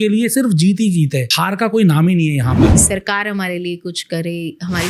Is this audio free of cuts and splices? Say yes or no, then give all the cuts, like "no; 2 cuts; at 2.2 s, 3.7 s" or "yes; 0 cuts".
no; 2 cuts; at 1.3 s, 2.8 s